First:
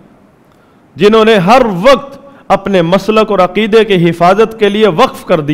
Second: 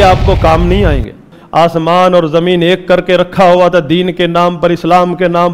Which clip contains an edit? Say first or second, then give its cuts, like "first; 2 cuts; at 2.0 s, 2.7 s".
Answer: second; 1 cut; at 1.4 s